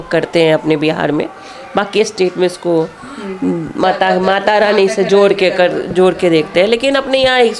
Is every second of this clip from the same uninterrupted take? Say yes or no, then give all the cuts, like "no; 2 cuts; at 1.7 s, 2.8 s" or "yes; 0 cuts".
yes; 0 cuts